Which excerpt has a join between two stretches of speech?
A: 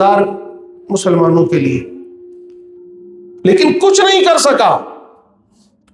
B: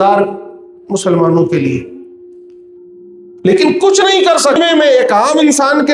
B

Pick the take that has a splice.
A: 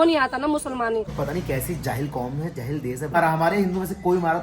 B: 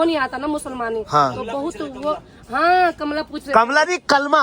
A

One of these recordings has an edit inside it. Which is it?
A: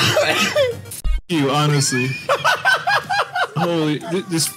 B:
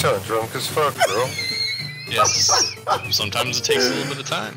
A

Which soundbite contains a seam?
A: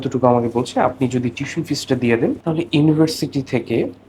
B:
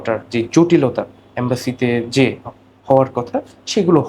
A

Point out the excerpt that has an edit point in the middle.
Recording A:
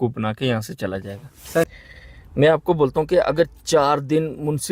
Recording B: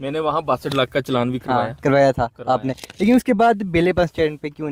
A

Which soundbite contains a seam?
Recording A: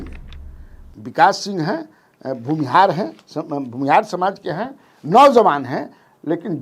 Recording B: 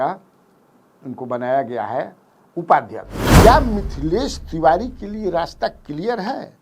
B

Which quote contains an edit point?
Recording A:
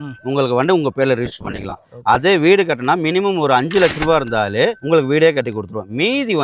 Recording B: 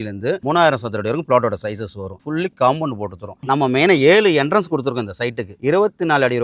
B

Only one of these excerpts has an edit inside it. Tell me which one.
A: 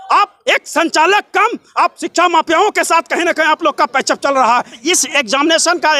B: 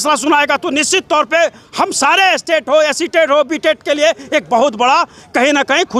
A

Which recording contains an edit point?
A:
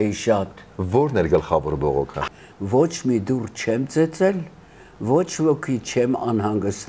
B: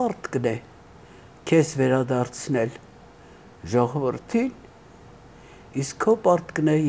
A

